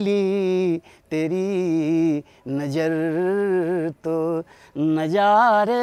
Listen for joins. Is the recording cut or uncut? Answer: uncut